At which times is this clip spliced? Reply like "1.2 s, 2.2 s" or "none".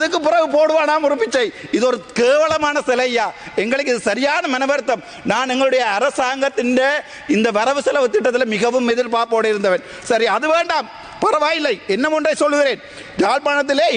none